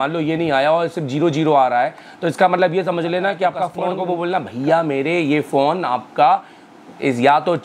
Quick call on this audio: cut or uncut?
cut